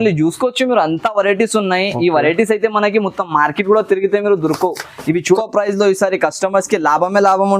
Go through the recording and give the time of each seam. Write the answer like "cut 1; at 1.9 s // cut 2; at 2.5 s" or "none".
cut 1; at 5.4 s

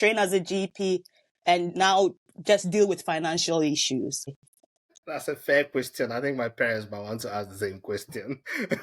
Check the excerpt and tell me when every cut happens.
cut 1; at 4.3 s

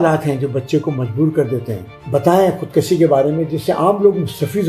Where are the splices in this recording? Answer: cut 1; at 1.9 s

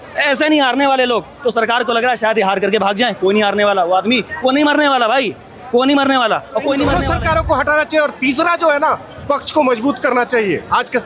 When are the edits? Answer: cut 1; at 7.0 s

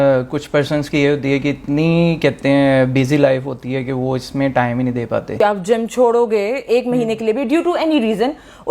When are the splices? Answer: cut 1; at 5.3 s

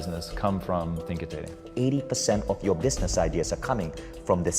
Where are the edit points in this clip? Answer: cut 1; at 1.6 s

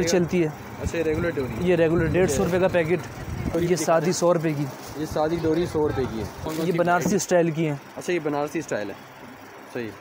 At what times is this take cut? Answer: cut 1; at 3.5 s // cut 2; at 6.5 s

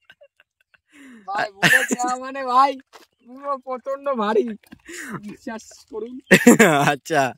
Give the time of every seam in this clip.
none

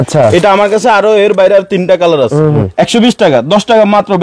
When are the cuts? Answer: cut 1; at 2.6 s

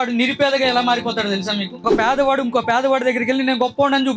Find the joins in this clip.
cut 1; at 1.8 s

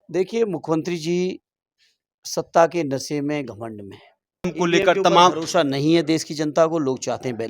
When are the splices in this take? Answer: cut 1; at 4.5 s

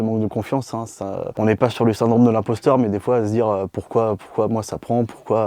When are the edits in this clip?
none

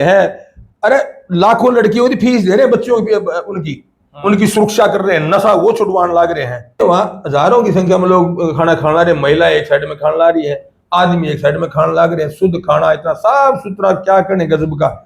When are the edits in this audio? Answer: cut 1; at 6.8 s

